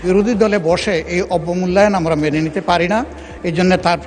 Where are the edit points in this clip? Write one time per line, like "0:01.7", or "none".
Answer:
none